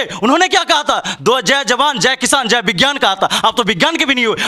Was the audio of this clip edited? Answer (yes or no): no